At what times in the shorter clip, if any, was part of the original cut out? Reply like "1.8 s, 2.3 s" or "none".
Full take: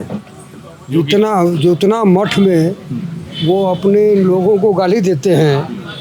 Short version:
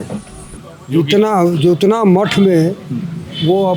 none